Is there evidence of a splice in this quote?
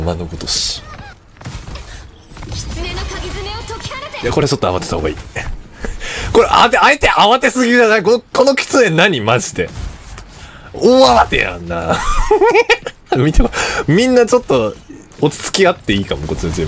yes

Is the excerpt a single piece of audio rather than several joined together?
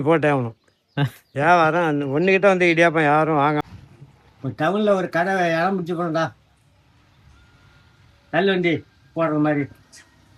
no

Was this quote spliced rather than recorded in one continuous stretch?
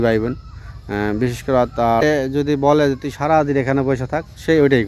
yes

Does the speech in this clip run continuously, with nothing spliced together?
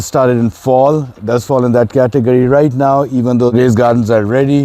no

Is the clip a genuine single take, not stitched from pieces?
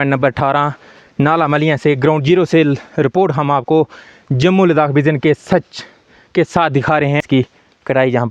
no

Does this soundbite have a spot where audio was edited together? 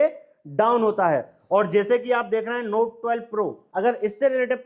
yes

